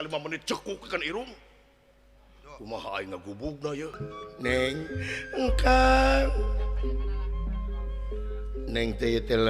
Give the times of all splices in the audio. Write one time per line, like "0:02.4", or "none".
0:04.0